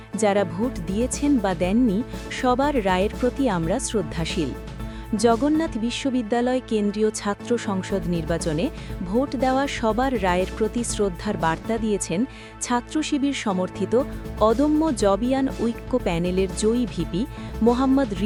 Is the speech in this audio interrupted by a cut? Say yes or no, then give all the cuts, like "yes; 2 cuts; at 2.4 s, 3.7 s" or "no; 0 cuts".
no; 0 cuts